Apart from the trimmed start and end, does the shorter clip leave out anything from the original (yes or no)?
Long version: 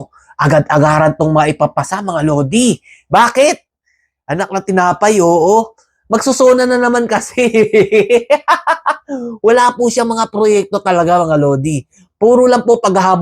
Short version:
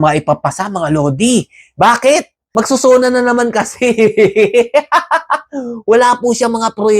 yes